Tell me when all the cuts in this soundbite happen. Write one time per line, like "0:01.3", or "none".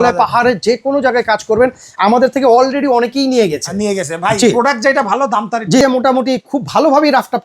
0:05.8